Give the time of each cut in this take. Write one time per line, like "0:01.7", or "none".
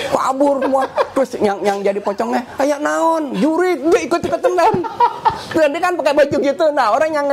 none